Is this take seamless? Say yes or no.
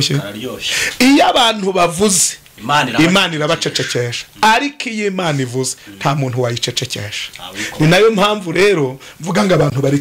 yes